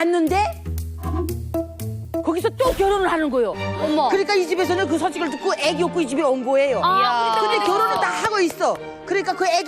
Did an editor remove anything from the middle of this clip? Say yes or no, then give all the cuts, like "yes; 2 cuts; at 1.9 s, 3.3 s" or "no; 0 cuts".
yes; 1 cut; at 1.9 s